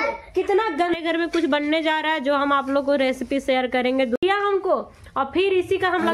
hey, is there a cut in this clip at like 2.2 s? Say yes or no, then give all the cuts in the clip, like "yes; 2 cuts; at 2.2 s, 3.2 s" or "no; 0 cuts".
no; 2 cuts; at 0.9 s, 4.2 s